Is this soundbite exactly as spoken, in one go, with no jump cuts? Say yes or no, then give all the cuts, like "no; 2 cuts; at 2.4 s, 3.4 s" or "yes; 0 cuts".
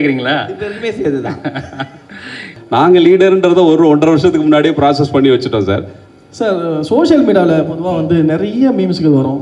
no; 2 cuts; at 2.5 s, 6.0 s